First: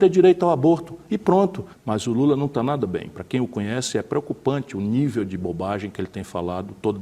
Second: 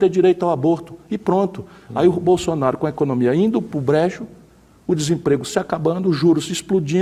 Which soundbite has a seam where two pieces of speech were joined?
first; 1 cut; at 1.7 s

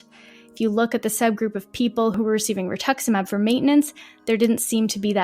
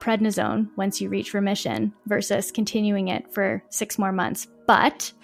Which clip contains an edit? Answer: first; 1 cut; at 2.1 s

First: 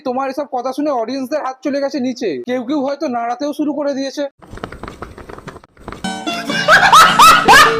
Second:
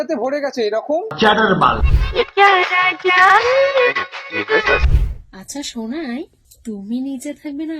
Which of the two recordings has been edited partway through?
second; 3 cuts; at 1.8 s, 4.9 s, 6.4 s

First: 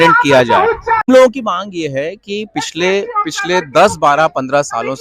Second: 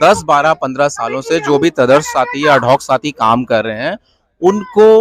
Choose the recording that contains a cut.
first; 1 cut; at 1.1 s

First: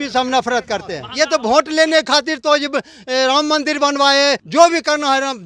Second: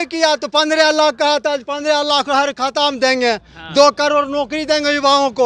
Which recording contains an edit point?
first; 2 cuts; at 1.0 s, 4.4 s

